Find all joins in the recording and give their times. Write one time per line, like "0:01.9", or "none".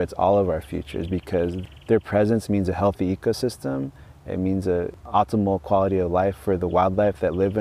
0:01.6
0:05.1

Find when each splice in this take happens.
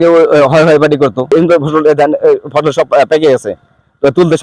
0:01.2

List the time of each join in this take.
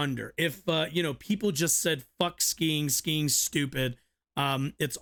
none

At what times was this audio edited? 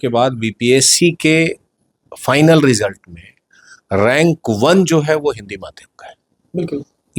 none

